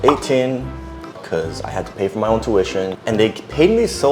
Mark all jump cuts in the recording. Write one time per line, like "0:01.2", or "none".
0:01.2
0:03.0